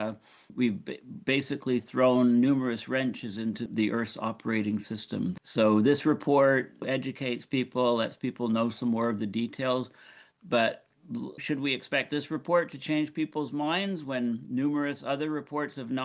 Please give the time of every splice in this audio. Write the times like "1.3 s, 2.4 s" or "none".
none